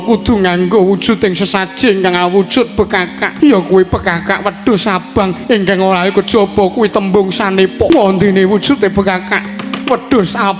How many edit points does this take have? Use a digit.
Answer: 2